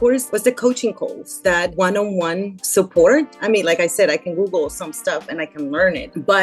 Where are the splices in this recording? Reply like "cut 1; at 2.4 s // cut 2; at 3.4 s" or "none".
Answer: cut 1; at 1.7 s // cut 2; at 3.3 s